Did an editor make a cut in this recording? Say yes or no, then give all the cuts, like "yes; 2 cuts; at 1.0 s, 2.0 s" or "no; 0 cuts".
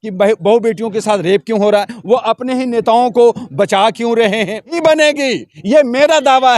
yes; 1 cut; at 4.7 s